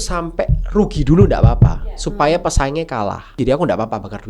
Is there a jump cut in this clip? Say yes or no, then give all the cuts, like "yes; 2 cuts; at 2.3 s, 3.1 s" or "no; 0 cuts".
yes; 1 cut; at 3.4 s